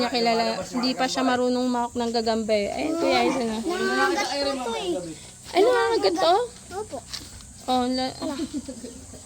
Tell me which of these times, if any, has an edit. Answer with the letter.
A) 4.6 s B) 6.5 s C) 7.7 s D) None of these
D